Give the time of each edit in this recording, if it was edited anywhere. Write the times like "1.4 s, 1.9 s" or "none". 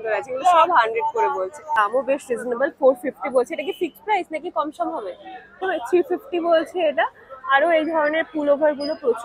1.7 s, 5.6 s